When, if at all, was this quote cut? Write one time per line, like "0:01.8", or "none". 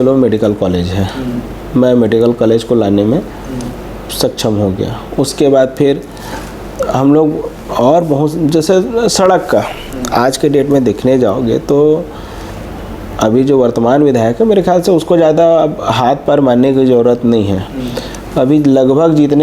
none